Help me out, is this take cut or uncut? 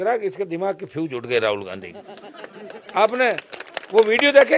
uncut